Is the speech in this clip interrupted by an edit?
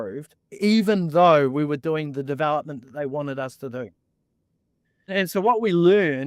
yes; 1 cut; at 5.1 s

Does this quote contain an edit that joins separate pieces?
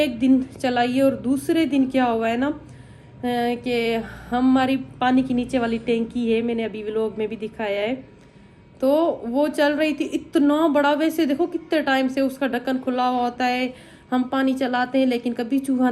no; 0 cuts

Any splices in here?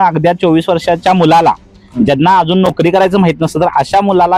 no; 0 cuts

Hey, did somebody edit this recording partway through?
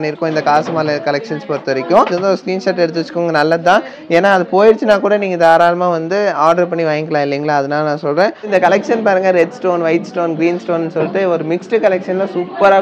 yes; 2 cuts; at 2.1 s, 8.4 s

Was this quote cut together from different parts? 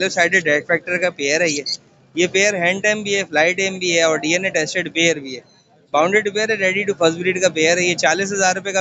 no; 0 cuts

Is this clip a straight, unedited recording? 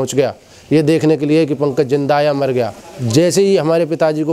no; 1 cut; at 2.8 s

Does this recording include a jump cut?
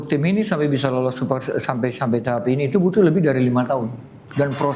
no; 0 cuts

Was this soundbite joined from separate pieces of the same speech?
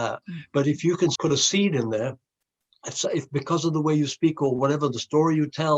yes; 1 cut; at 1.2 s

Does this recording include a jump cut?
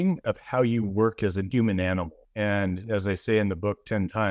yes; 2 cuts; at 1.5 s, 2.2 s

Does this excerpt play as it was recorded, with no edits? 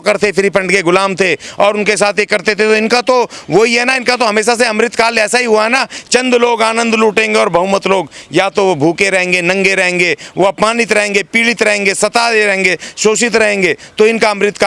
yes; 0 cuts

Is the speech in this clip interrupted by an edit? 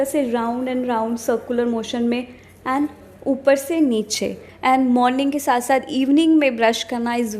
yes; 1 cut; at 4.5 s

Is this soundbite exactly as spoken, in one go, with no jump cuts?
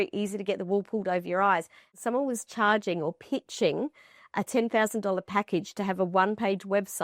no; 1 cut; at 1.9 s

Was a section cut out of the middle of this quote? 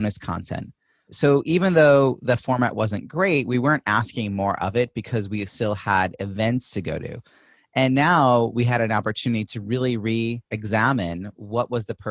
yes; 2 cuts; at 1.1 s, 10.5 s

